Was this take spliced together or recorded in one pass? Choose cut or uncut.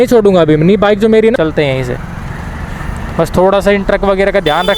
cut